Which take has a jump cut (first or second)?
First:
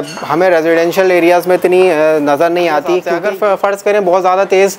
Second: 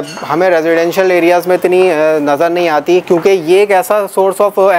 first